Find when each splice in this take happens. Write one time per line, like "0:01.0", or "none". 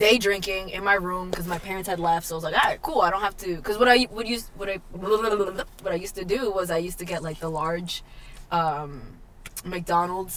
none